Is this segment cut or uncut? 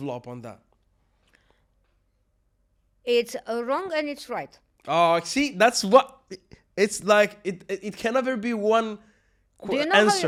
uncut